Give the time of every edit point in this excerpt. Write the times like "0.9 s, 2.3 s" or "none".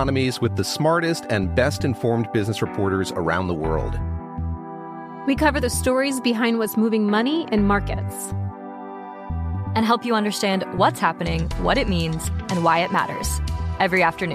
none